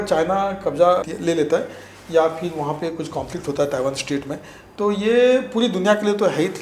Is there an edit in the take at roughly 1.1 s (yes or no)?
yes